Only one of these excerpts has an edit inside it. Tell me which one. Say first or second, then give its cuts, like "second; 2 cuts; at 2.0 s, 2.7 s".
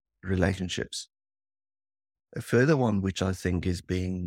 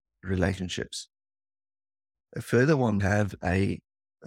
second; 1 cut; at 3.0 s